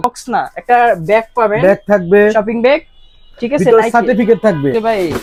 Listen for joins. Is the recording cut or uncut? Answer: uncut